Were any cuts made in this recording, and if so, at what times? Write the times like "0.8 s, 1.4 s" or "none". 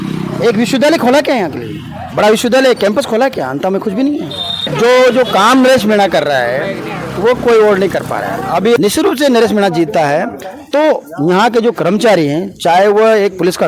4.6 s, 8.8 s